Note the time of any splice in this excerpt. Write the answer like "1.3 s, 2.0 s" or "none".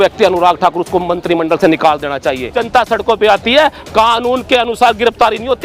2.6 s